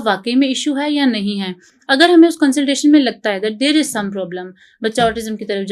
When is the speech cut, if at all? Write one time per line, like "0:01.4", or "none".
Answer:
none